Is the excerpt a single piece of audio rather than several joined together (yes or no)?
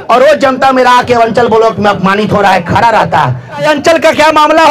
no